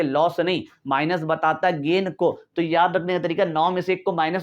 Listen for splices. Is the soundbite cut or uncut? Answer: uncut